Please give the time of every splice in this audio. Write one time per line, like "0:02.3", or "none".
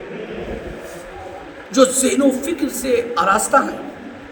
none